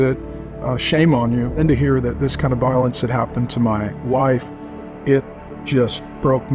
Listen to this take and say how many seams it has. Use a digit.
1